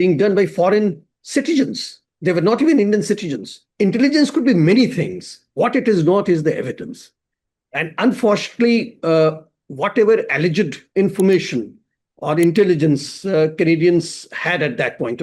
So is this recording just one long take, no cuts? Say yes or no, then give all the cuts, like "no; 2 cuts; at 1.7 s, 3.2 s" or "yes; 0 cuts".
no; 1 cut; at 3.6 s